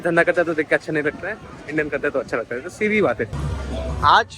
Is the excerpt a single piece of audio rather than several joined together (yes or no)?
no